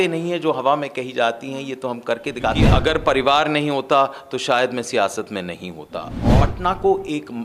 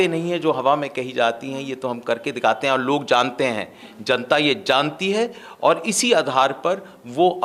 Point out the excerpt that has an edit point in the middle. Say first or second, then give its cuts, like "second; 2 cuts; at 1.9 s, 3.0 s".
first; 2 cuts; at 2.6 s, 6.3 s